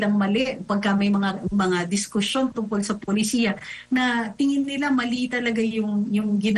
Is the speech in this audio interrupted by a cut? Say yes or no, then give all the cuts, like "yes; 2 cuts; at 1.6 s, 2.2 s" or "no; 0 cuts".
no; 0 cuts